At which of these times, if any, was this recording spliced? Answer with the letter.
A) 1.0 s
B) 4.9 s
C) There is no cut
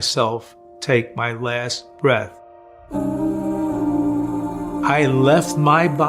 B